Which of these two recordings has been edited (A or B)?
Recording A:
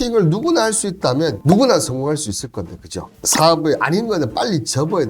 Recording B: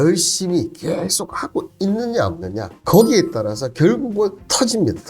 A